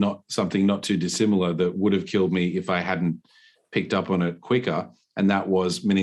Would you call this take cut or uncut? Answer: uncut